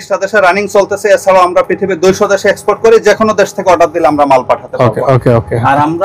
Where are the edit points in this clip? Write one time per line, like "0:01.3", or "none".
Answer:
none